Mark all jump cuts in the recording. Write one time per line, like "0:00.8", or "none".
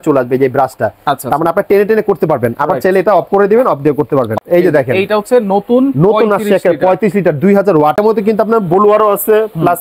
0:04.4
0:08.0